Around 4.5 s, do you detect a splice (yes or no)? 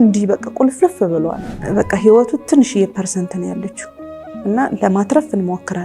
no